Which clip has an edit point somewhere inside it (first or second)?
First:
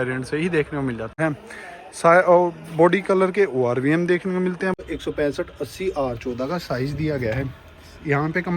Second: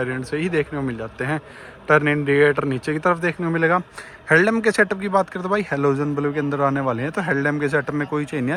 first